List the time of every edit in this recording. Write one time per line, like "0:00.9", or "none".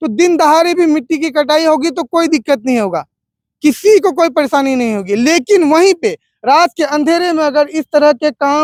none